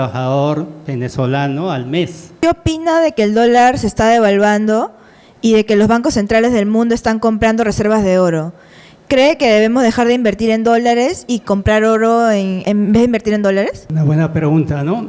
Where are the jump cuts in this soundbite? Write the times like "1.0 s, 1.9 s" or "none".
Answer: 2.3 s, 12.6 s, 13.8 s